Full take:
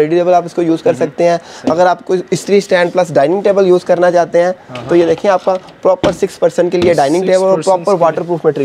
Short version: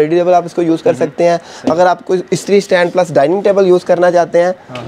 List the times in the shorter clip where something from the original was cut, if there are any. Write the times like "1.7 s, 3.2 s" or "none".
none